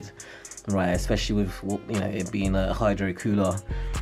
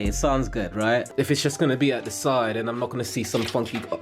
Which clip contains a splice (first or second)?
second